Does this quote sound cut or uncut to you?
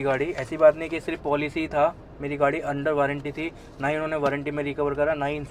uncut